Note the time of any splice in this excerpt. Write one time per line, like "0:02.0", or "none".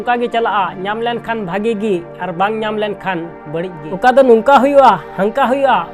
0:03.4